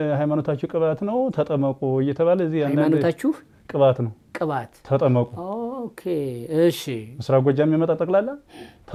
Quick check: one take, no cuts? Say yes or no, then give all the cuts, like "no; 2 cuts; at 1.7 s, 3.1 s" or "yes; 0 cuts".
yes; 0 cuts